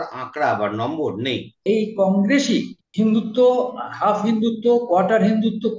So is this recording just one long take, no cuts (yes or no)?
no